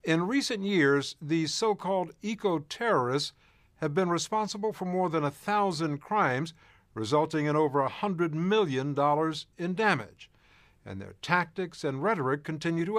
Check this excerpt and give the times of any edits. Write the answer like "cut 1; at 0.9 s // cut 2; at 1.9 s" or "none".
cut 1; at 9.0 s

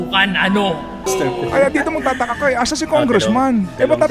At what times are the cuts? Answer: cut 1; at 1.1 s

